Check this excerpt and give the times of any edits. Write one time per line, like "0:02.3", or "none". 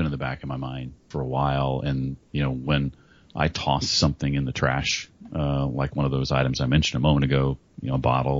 0:01.0